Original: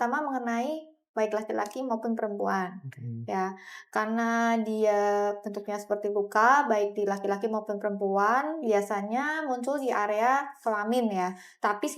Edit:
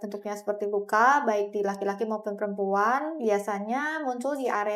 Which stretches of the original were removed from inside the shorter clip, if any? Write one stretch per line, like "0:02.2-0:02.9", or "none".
none